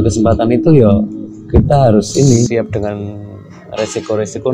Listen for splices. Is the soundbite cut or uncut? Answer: cut